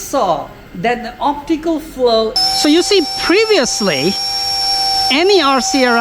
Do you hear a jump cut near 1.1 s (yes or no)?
no